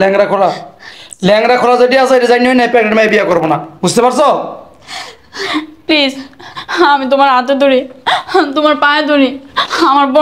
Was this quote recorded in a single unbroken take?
yes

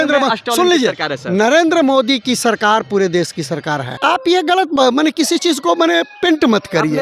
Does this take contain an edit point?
yes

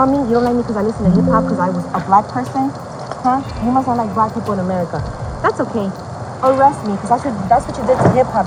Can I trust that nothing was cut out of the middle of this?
yes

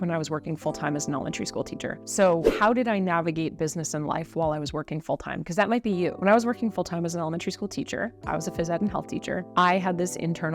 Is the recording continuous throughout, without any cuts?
yes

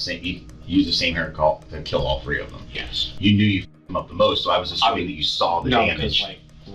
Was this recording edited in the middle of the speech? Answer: yes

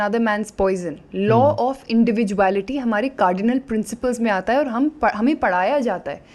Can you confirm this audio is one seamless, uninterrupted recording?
yes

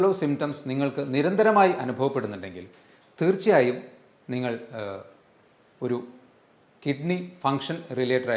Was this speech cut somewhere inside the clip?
no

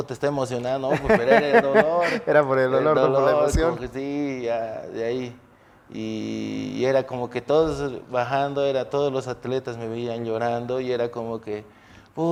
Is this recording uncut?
yes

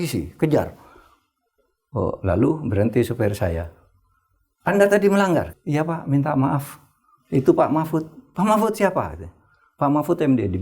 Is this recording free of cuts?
no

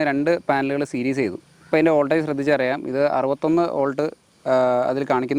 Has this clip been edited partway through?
no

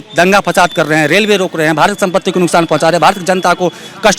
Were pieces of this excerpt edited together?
no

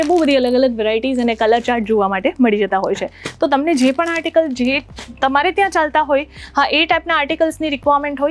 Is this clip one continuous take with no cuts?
yes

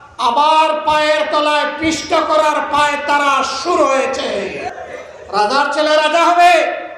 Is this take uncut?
no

